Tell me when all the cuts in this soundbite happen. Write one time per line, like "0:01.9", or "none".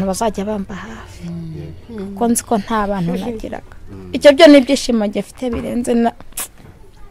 none

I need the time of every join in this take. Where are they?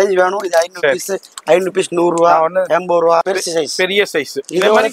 0:03.2

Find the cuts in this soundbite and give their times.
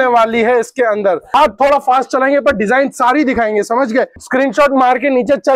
0:01.2
0:04.1

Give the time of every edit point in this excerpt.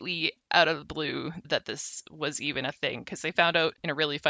0:01.4

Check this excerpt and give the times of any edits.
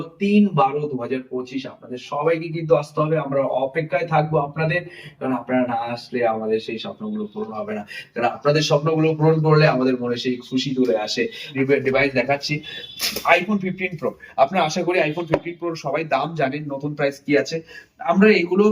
0:11.5

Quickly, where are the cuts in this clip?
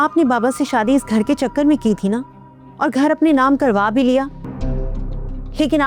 0:04.5

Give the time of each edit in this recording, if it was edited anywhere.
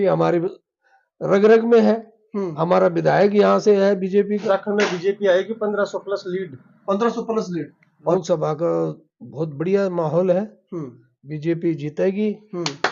0:04.4
0:08.1

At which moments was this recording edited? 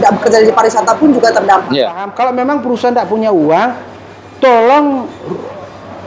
0:02.1

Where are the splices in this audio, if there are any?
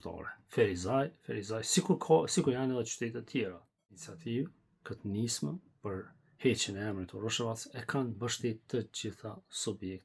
0:04.1

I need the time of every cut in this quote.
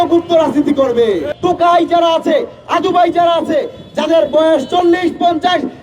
0:01.3

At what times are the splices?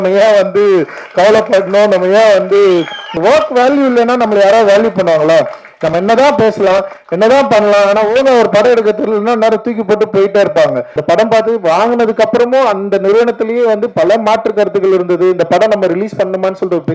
0:03.2
0:10.9

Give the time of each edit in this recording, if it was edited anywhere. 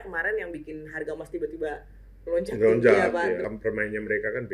0:03.4

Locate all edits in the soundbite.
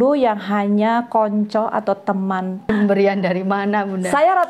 0:02.6

